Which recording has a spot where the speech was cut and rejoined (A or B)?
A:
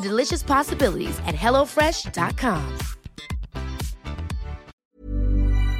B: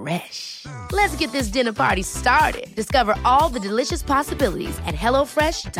A